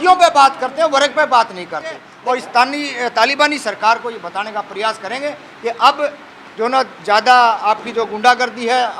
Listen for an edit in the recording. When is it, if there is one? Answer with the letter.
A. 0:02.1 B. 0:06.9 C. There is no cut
A